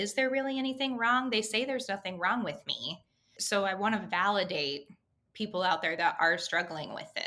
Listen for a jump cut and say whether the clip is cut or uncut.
uncut